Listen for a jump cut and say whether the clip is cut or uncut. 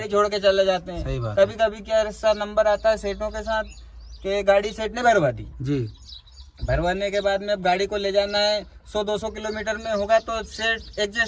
uncut